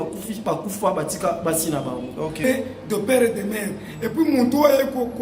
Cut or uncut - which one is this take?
cut